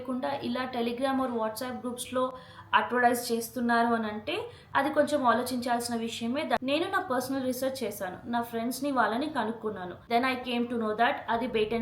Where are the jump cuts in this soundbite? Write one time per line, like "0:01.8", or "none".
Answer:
0:06.6
0:10.0